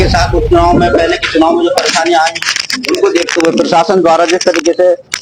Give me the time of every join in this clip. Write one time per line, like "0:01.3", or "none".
none